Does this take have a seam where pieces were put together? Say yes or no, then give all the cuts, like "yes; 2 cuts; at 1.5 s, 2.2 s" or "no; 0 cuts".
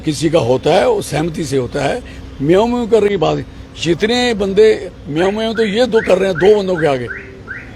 no; 0 cuts